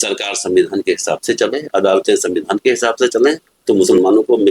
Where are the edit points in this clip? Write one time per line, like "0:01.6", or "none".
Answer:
0:03.5